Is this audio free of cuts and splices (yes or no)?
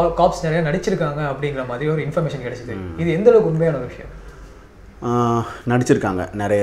yes